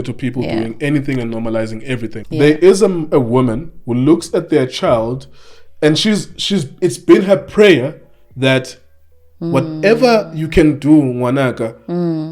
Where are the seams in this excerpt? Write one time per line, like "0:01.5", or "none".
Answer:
0:02.2